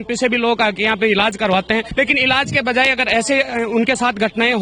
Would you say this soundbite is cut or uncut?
cut